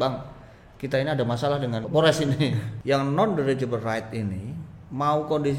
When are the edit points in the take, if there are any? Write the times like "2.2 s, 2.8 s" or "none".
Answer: 1.8 s, 2.7 s